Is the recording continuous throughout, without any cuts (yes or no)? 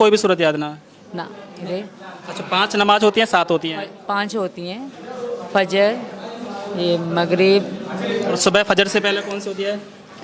no